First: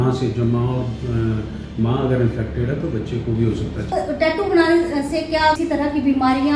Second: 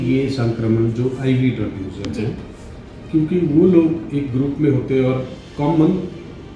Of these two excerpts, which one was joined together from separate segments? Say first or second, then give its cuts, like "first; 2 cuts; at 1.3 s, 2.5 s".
first; 2 cuts; at 3.9 s, 5.6 s